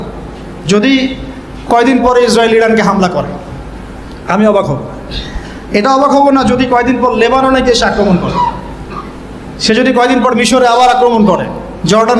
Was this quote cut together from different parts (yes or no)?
no